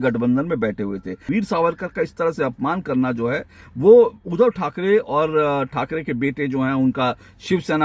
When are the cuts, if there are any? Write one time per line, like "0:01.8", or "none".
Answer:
0:01.2

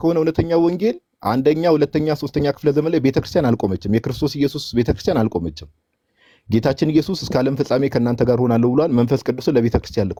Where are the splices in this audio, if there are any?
none

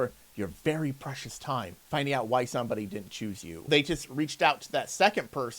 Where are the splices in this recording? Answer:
0:01.8
0:03.7

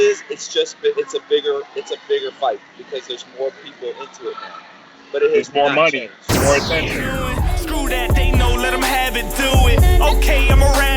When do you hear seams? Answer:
0:07.0

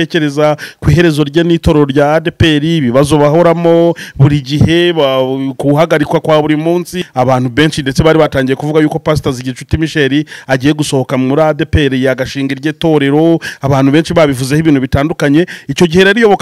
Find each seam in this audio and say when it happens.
0:07.0

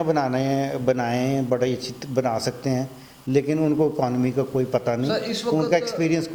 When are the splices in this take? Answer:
none

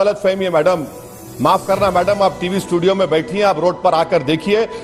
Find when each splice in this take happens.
none

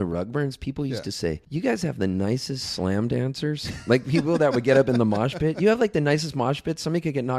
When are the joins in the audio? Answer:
0:01.4

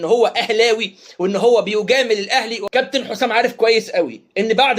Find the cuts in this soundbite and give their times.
none

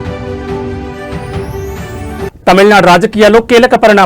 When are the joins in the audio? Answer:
0:02.0

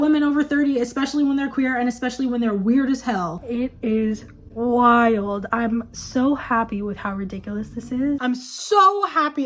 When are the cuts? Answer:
0:03.4
0:08.2

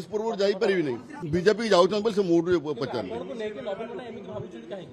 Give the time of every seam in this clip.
0:01.1

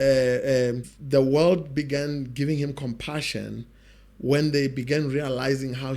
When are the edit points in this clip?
0:00.9

